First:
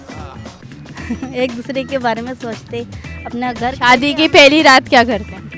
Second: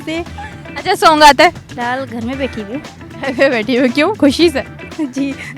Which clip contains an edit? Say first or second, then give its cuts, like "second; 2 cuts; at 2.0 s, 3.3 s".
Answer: second; 1 cut; at 1.7 s